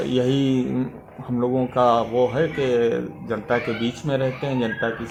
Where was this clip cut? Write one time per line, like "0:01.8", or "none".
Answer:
none